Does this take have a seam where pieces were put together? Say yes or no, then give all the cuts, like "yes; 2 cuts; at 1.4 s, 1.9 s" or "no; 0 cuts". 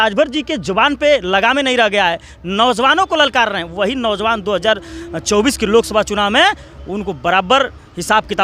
no; 0 cuts